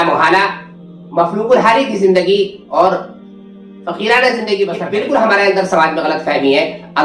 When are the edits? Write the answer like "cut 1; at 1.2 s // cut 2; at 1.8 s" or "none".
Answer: cut 1; at 4.8 s